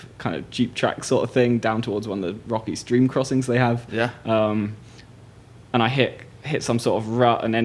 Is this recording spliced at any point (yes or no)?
no